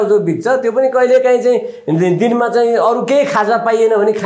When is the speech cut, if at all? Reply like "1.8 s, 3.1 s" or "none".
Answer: none